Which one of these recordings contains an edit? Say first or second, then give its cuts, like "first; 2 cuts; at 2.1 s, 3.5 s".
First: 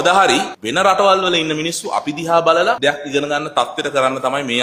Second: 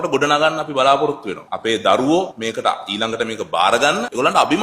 second; 1 cut; at 1.5 s